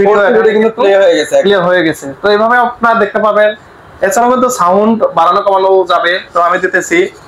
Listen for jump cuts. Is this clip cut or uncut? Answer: uncut